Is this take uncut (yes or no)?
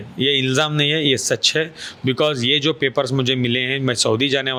yes